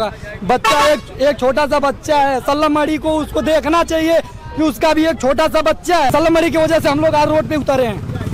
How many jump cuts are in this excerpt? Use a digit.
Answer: 1